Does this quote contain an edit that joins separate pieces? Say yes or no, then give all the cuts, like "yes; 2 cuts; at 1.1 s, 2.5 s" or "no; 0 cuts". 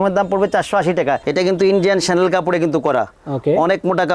yes; 1 cut; at 1.2 s